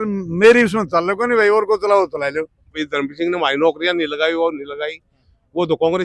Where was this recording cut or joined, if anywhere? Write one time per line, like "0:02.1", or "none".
0:02.8

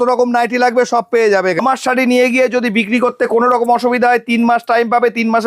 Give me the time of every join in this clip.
0:01.6

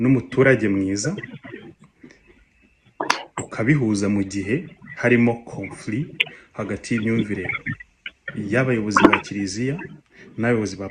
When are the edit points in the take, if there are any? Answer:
none

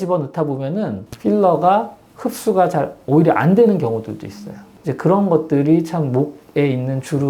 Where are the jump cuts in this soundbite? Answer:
0:01.0

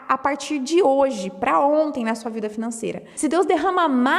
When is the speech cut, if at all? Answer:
0:03.0

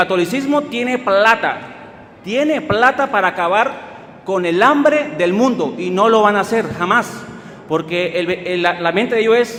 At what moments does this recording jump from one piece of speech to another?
none

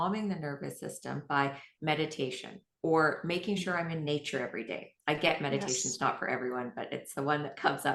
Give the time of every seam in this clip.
none

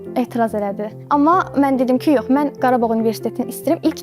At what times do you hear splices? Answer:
0:00.9

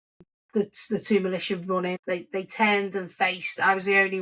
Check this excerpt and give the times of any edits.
0:02.0

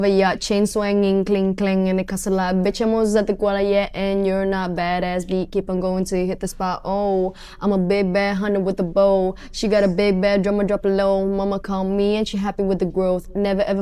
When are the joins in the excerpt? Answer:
none

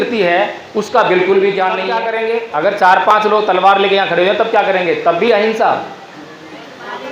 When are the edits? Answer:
0:02.1

